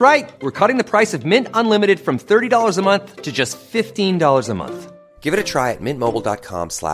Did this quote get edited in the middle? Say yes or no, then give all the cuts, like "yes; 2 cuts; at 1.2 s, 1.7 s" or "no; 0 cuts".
no; 0 cuts